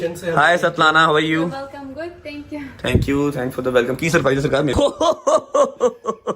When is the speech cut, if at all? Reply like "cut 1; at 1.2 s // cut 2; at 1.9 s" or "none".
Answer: cut 1; at 4.7 s